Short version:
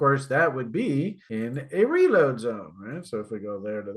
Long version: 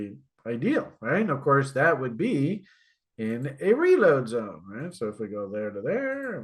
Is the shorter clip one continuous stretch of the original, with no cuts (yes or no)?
no